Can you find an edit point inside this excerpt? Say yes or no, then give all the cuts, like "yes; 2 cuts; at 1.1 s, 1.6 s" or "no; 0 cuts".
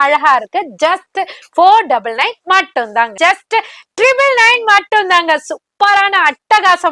yes; 1 cut; at 3.1 s